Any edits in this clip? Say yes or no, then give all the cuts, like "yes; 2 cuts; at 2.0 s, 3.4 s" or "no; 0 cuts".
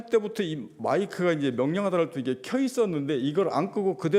no; 0 cuts